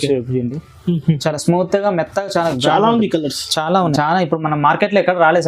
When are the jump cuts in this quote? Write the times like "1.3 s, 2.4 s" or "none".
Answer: 3.9 s